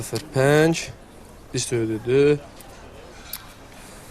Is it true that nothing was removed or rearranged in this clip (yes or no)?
no